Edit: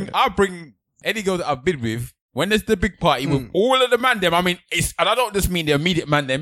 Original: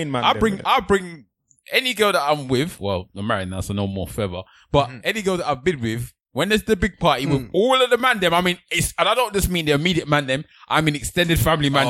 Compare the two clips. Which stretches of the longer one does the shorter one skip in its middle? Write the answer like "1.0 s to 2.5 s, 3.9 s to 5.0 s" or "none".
1.5 s to 5.0 s